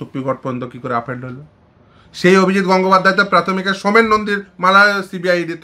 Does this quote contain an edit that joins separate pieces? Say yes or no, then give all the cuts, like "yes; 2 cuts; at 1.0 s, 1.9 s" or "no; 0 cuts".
no; 0 cuts